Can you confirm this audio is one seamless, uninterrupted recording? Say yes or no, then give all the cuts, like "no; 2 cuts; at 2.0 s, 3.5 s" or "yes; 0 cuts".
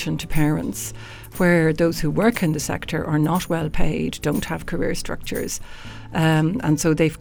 yes; 0 cuts